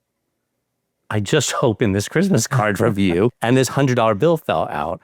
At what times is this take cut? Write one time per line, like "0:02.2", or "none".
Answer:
0:03.4